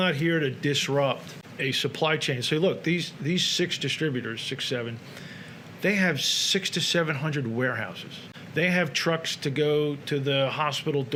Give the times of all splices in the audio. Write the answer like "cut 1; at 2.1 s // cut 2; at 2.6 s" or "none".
none